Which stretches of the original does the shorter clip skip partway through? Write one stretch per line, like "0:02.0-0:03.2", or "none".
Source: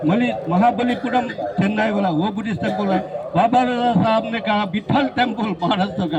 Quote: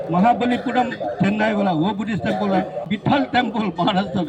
0:03.2-0:04.7